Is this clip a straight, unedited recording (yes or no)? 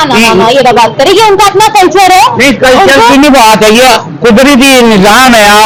yes